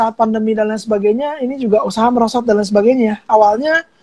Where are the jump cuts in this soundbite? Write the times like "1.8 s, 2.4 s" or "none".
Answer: none